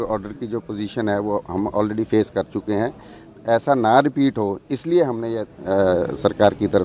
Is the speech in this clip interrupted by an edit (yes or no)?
no